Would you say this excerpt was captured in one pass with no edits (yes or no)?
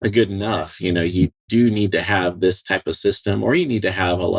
no